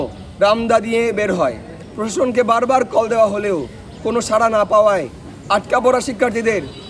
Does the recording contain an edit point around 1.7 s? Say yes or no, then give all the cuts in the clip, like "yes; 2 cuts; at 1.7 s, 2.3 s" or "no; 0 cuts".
yes; 1 cut; at 1.7 s